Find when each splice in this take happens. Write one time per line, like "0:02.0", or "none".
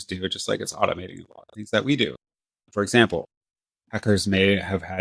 none